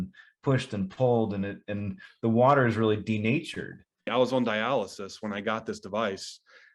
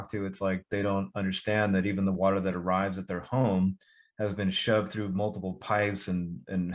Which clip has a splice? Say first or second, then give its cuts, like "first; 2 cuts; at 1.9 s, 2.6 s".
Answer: first; 1 cut; at 4.1 s